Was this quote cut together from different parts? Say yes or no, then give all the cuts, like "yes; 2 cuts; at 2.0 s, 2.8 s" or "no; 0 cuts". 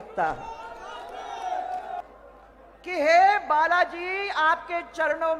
yes; 1 cut; at 2.1 s